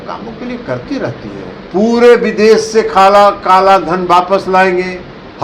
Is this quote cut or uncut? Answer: cut